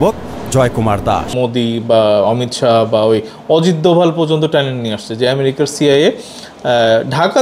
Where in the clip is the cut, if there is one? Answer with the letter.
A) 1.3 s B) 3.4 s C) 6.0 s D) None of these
A